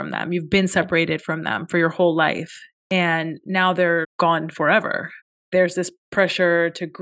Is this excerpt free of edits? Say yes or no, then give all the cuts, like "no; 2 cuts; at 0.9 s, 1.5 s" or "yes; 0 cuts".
yes; 0 cuts